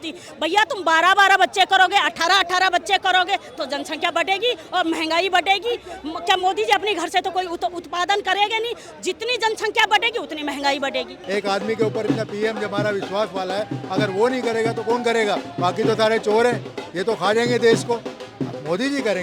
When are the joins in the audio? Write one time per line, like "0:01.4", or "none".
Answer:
0:11.2